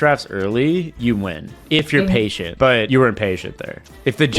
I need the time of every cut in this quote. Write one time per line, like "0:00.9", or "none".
0:02.6